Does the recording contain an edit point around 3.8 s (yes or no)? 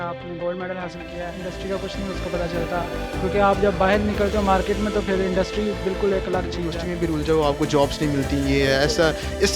no